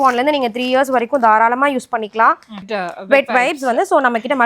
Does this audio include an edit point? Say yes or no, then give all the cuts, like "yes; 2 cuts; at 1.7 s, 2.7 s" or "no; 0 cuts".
yes; 1 cut; at 2.6 s